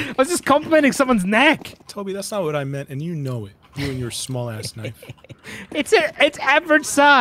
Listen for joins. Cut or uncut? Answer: cut